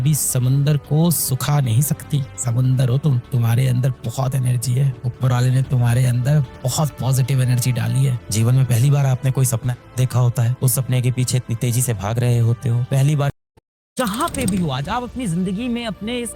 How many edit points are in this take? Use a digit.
1